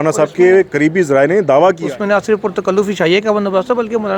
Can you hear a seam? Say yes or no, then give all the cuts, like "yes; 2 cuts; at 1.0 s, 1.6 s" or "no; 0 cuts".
yes; 1 cut; at 1.8 s